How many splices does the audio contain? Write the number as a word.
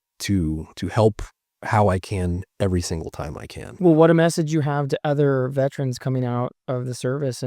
one